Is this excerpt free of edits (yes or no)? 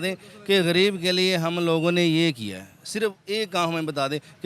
yes